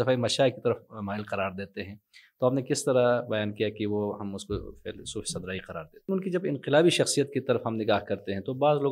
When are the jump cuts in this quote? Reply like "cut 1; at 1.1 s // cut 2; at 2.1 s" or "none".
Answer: cut 1; at 6.1 s